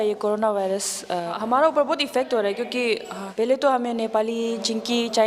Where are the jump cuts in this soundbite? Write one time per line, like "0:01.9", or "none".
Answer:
0:01.4
0:03.2